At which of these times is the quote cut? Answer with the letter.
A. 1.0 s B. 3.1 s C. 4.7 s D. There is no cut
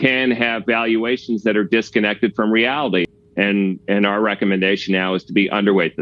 B